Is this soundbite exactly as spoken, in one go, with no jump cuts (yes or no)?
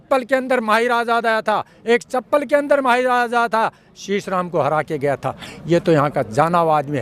yes